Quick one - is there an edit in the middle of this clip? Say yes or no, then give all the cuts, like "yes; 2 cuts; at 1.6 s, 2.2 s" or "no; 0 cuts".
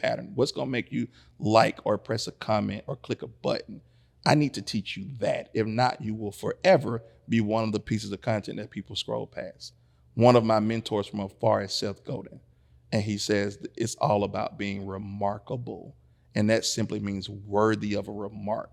no; 0 cuts